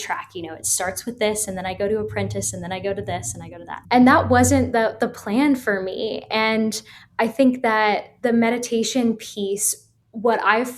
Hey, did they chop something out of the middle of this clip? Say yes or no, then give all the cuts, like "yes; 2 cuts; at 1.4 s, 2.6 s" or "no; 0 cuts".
yes; 1 cut; at 3.7 s